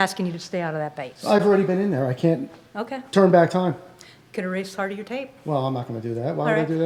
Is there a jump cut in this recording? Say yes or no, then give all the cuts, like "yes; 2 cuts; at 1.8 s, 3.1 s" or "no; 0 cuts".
no; 0 cuts